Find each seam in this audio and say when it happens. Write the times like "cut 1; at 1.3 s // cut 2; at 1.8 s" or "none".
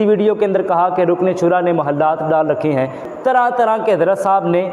cut 1; at 3.0 s